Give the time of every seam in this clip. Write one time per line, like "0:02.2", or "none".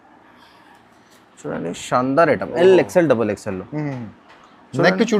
none